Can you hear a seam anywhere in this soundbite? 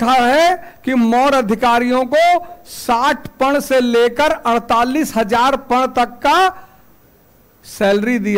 no; 0 cuts

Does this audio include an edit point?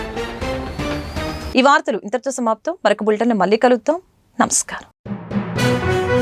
no; 0 cuts

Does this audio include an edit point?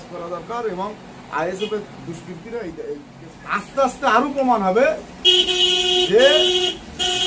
yes; 1 cut; at 3.2 s

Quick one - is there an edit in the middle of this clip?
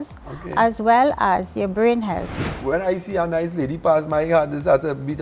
yes; 1 cut; at 2.4 s

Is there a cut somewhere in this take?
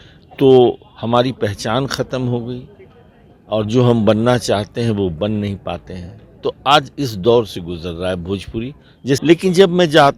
yes; 1 cut; at 9.2 s

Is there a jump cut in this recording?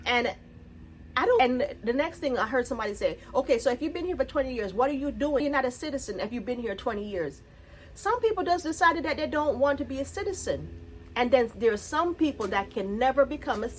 yes; 2 cuts; at 1.4 s, 5.4 s

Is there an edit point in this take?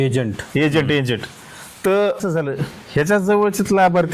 yes; 1 cut; at 2.3 s

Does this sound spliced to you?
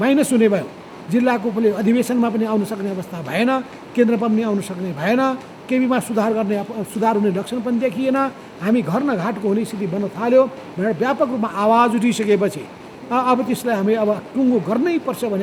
no; 0 cuts

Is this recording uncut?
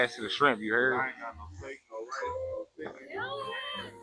yes; 0 cuts

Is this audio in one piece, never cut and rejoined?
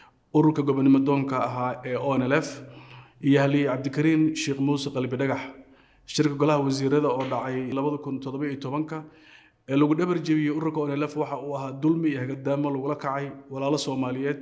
no; 1 cut; at 7.7 s

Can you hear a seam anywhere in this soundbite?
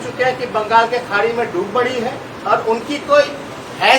yes; 1 cut; at 2.3 s

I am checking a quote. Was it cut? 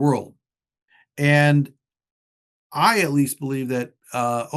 no; 0 cuts

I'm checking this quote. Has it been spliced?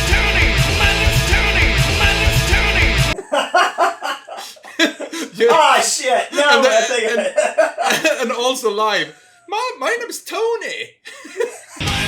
no; 0 cuts

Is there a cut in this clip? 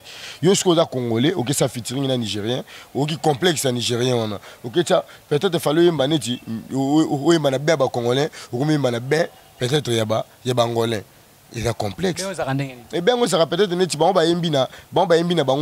no; 0 cuts

